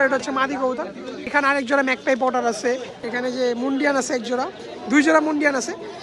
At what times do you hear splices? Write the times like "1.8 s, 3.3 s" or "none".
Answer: 1.3 s, 3.0 s